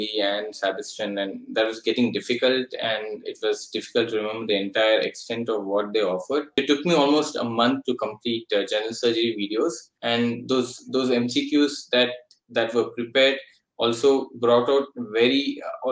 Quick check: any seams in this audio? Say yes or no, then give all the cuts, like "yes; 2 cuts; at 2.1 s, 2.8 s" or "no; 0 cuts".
yes; 2 cuts; at 6.5 s, 9.9 s